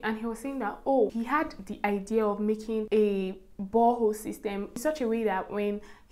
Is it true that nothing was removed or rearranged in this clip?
no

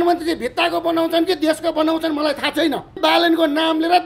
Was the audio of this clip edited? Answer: yes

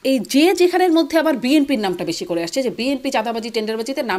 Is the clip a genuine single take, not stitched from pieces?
yes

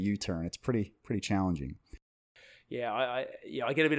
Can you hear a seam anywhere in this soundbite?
yes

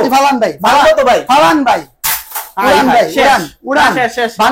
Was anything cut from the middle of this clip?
no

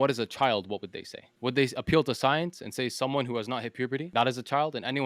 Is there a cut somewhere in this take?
no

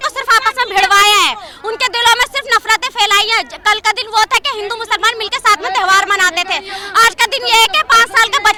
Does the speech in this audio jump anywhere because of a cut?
no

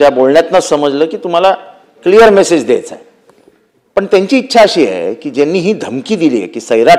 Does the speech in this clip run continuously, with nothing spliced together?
yes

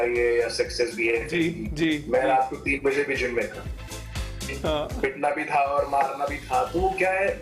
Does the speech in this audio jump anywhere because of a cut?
yes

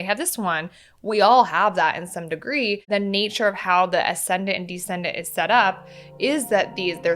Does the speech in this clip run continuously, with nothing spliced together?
no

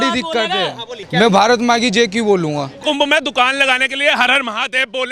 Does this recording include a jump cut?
yes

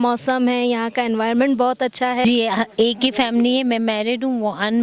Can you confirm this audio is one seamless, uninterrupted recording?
no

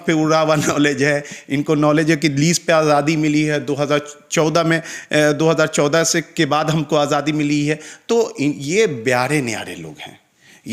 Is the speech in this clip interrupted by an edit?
no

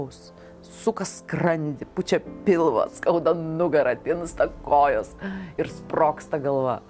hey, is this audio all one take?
yes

